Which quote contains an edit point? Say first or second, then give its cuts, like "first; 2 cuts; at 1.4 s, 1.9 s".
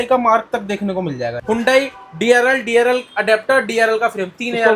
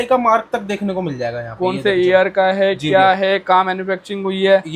first; 1 cut; at 1.3 s